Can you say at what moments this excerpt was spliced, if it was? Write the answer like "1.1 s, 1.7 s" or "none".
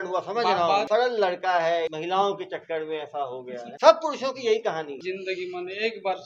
0.9 s, 2.0 s, 3.7 s, 5.0 s